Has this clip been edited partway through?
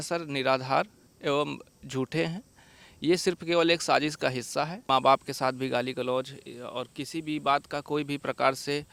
yes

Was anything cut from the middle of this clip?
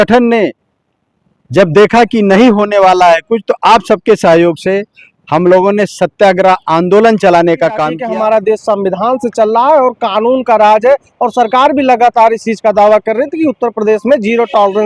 yes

